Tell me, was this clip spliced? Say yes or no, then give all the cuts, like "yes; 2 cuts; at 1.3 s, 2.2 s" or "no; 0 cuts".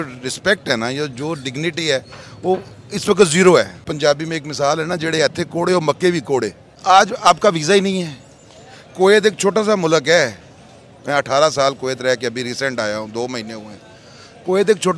yes; 2 cuts; at 3.8 s, 6.8 s